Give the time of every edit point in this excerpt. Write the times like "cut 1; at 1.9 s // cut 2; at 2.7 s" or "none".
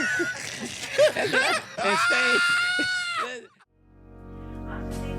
cut 1; at 3.5 s